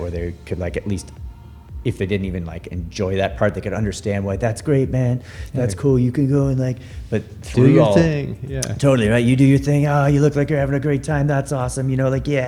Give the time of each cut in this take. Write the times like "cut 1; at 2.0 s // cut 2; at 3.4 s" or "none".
none